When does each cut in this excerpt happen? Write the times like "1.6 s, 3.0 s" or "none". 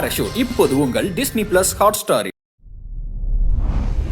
none